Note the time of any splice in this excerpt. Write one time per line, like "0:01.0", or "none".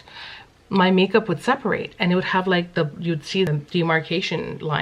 0:03.5